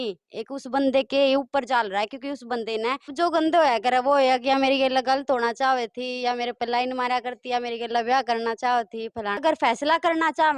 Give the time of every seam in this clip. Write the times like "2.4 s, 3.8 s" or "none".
3.1 s, 9.4 s